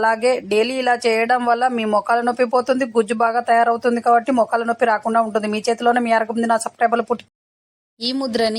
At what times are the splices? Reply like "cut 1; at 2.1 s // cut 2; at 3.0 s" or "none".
cut 1; at 7.4 s